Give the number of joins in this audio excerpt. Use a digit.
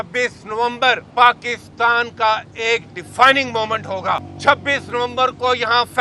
2